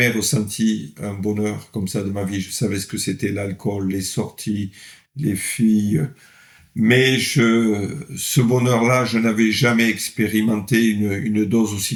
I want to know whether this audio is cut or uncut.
uncut